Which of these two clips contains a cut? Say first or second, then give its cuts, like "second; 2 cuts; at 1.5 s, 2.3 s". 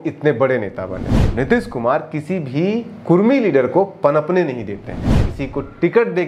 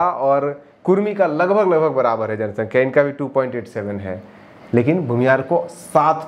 first; 2 cuts; at 1.2 s, 5.3 s